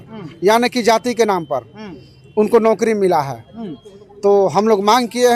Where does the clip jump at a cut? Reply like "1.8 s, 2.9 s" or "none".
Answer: none